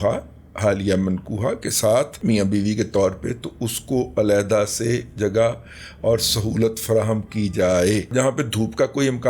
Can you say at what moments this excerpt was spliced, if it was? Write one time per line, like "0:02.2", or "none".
0:02.2
0:08.1